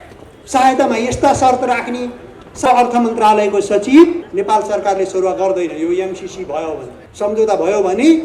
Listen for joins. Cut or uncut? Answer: cut